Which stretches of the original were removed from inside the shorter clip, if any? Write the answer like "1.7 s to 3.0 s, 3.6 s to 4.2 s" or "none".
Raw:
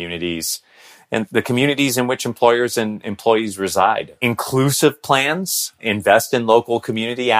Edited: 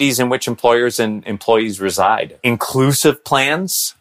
none